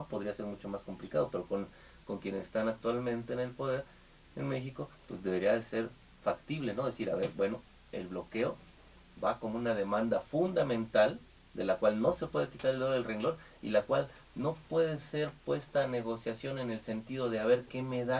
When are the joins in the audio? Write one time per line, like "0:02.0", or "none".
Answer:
0:17.0